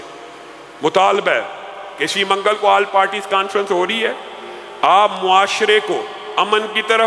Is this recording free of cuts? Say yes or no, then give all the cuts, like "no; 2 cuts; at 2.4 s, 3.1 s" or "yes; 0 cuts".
yes; 0 cuts